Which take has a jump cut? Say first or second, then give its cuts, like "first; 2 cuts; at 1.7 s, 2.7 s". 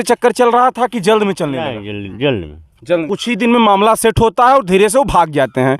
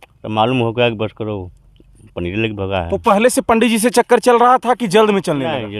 first; 1 cut; at 3.1 s